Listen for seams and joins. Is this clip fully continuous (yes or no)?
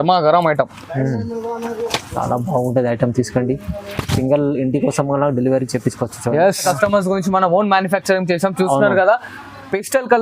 no